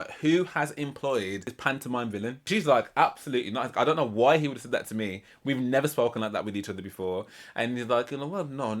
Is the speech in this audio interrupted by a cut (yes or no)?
yes